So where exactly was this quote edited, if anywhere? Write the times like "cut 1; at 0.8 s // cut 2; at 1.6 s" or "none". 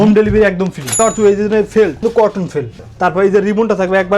cut 1; at 1.0 s // cut 2; at 2.0 s